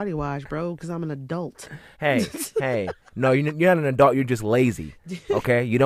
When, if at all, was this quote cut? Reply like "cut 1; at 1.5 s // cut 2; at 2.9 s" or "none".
none

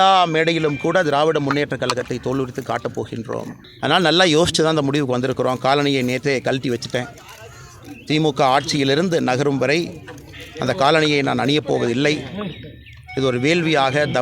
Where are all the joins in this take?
cut 1; at 3.6 s

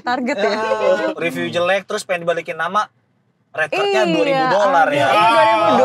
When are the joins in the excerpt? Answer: cut 1; at 1.0 s

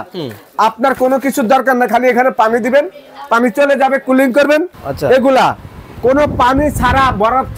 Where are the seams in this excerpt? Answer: cut 1; at 4.8 s

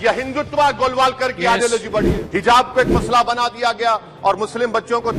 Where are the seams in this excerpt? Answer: cut 1; at 2.2 s

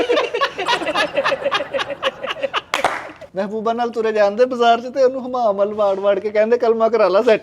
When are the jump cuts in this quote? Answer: cut 1; at 2.7 s

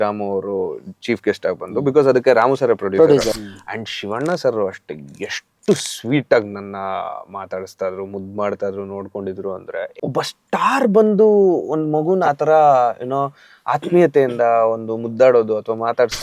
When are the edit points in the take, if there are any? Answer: cut 1; at 3.4 s // cut 2; at 9.9 s

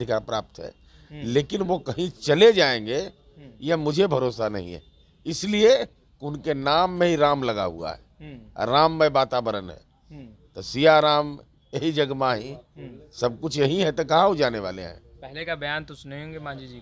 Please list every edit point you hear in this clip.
none

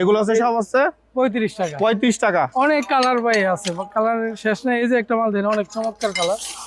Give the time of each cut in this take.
none

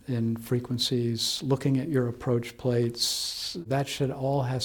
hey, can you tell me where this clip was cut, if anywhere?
cut 1; at 3.6 s

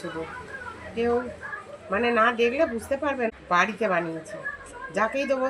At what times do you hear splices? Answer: cut 1; at 3.3 s

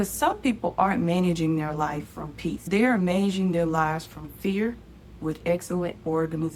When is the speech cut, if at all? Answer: none

